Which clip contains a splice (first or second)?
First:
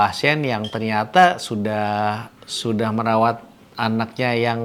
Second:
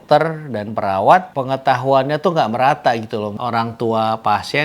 second